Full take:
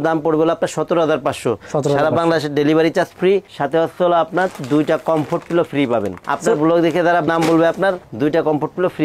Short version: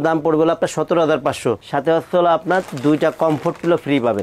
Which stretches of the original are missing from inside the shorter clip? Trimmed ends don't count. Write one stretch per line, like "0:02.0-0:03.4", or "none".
0:01.6-0:03.5